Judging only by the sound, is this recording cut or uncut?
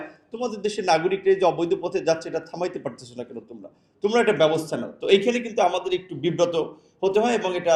uncut